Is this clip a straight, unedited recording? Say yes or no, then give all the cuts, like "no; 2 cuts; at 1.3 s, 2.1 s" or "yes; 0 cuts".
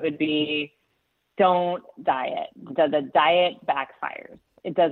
yes; 0 cuts